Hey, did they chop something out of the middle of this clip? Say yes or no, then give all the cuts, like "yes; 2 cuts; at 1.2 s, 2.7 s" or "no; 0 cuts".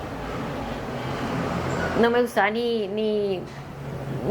no; 0 cuts